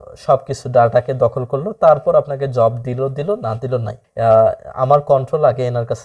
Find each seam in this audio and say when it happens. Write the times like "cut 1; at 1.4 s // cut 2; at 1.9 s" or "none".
cut 1; at 4.0 s

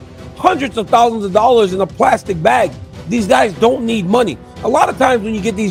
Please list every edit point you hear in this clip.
none

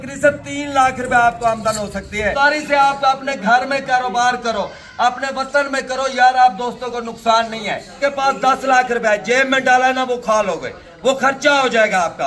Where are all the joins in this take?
cut 1; at 2.3 s // cut 2; at 8.0 s

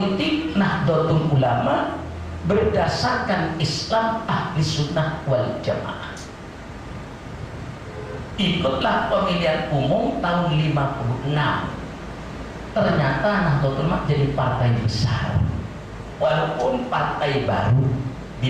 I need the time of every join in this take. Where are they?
none

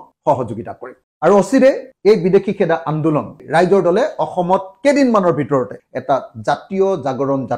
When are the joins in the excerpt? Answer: cut 1; at 1.9 s // cut 2; at 3.4 s // cut 3; at 5.9 s

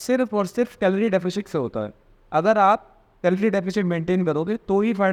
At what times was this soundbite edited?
none

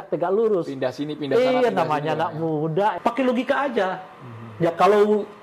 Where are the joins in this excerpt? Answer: cut 1; at 3.0 s

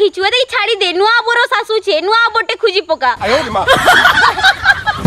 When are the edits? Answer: none

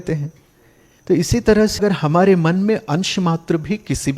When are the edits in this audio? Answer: cut 1; at 1.8 s

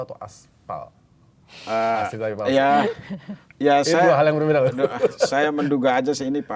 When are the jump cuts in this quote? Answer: none

